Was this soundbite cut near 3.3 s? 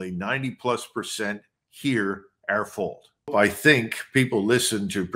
yes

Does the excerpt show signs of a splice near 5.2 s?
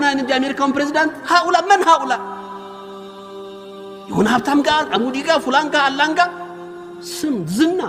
no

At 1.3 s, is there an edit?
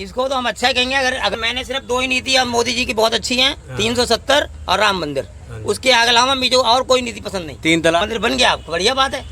yes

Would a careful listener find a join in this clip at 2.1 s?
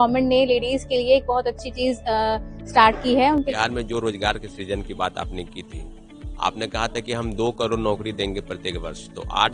no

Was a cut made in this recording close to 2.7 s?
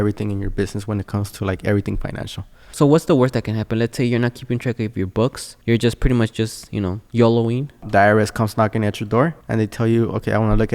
yes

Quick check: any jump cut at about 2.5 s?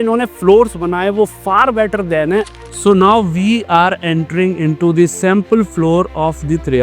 yes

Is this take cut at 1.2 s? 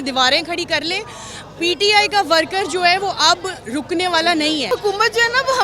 no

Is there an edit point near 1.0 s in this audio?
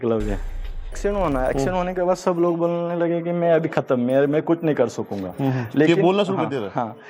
yes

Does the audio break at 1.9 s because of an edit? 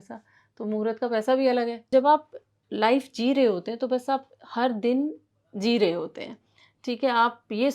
yes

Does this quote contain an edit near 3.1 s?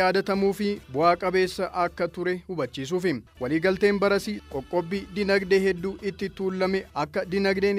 no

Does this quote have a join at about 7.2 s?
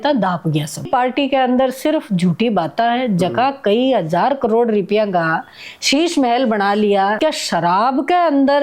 yes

